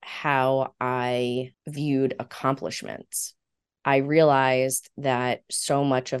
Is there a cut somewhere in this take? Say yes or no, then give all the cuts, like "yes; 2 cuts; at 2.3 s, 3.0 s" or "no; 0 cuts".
yes; 1 cut; at 1.6 s